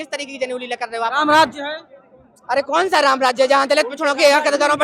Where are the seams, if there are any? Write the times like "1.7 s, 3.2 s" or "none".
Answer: none